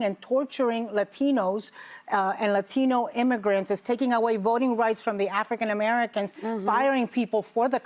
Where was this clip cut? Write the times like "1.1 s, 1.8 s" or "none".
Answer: none